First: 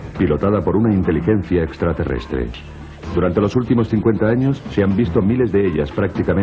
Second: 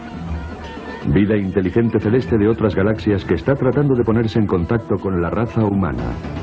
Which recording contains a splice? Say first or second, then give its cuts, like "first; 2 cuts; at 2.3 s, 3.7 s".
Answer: second; 1 cut; at 4.6 s